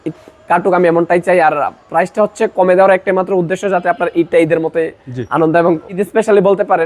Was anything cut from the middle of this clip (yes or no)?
yes